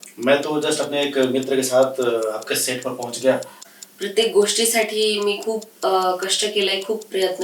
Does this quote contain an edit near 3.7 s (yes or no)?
yes